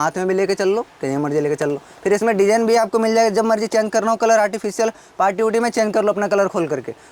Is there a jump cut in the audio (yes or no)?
no